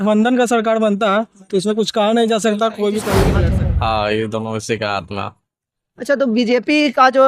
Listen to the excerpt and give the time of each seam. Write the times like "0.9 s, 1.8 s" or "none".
3.3 s